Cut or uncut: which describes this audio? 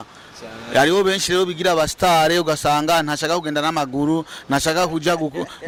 uncut